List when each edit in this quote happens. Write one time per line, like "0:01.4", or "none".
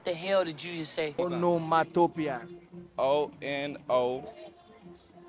0:01.1